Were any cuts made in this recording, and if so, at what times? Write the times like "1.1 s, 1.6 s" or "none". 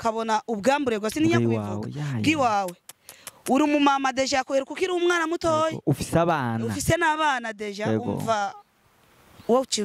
none